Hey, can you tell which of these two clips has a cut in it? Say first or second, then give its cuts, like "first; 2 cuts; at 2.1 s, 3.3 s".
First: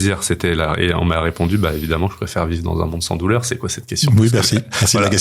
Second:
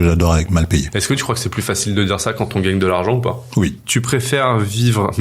second; 2 cuts; at 0.9 s, 3.8 s